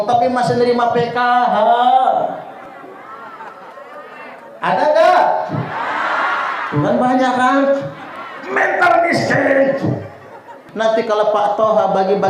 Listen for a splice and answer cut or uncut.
cut